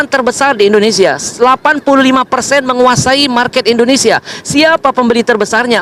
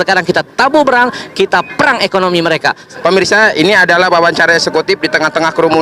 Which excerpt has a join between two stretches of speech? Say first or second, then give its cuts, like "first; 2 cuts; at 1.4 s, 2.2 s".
second; 1 cut; at 2.9 s